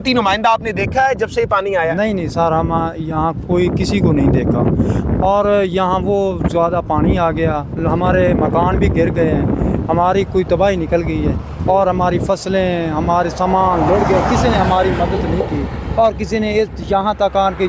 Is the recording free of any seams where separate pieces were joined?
yes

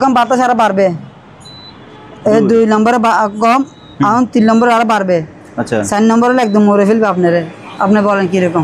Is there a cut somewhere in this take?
no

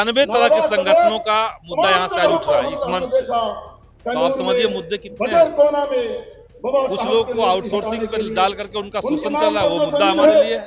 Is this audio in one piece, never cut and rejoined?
yes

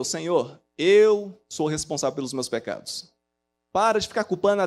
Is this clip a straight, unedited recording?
yes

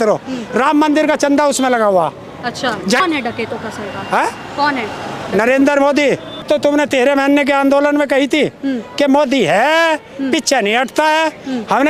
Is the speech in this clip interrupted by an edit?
yes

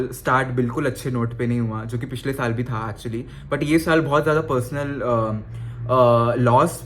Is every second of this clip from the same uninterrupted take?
yes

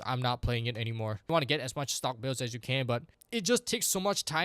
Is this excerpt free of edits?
no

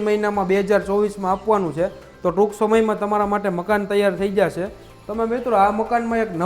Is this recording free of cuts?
yes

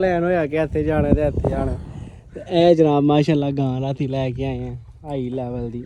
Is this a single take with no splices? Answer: yes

